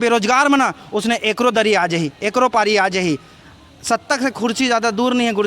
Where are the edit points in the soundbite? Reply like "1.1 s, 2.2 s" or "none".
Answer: 3.4 s